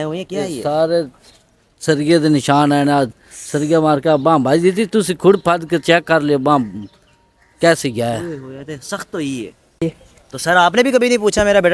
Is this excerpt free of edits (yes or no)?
no